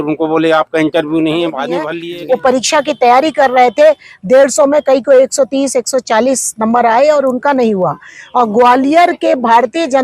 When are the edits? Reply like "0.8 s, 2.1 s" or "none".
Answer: 1.9 s

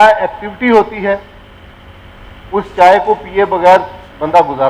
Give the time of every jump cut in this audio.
none

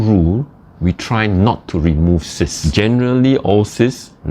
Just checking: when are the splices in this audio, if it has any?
2.6 s

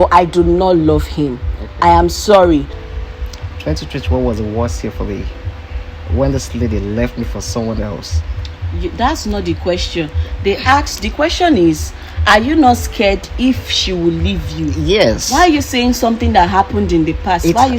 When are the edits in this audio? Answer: 2.7 s

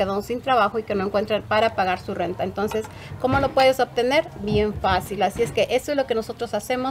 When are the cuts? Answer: none

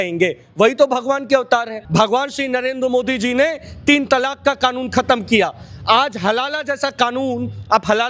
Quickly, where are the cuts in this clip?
1.8 s

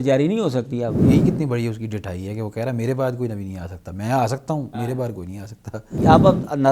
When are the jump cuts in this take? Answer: 1.0 s, 6.0 s

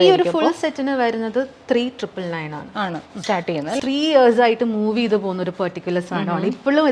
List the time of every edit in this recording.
3.8 s

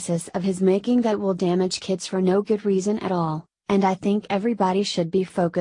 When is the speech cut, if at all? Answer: none

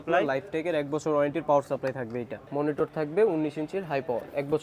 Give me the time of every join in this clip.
2.4 s

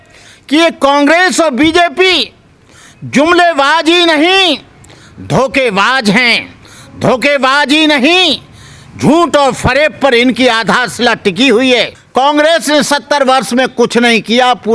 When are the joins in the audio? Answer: 12.0 s

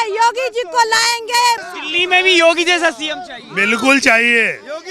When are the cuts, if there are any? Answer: 1.6 s

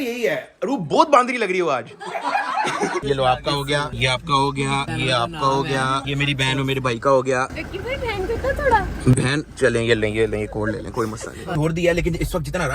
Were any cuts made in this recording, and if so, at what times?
3.0 s, 11.5 s

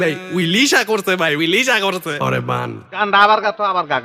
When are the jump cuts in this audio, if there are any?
3.0 s

